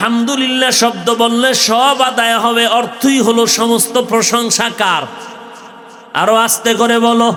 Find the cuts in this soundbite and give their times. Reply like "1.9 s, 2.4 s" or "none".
none